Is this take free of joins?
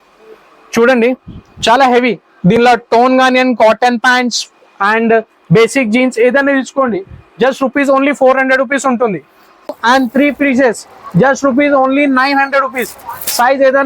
no; 1 cut; at 9.8 s

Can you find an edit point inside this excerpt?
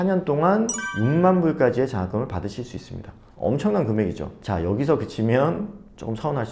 yes; 1 cut; at 4.3 s

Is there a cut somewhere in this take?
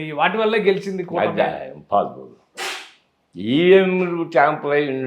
no; 0 cuts

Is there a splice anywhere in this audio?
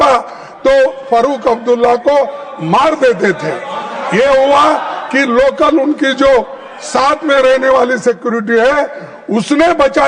no; 0 cuts

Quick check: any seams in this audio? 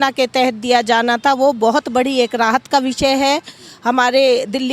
no; 0 cuts

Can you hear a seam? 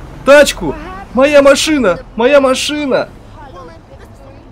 no; 0 cuts

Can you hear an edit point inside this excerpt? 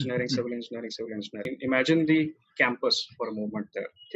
yes; 1 cut; at 1.5 s

